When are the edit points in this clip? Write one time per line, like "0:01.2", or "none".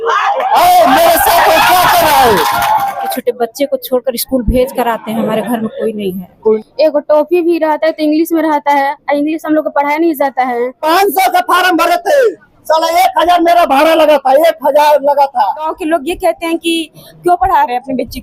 0:03.1
0:06.6
0:10.8
0:15.7